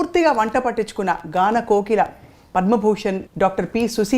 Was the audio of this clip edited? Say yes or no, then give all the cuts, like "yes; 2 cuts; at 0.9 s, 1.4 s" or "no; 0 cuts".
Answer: yes; 1 cut; at 3.3 s